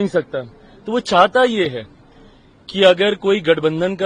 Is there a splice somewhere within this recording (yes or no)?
no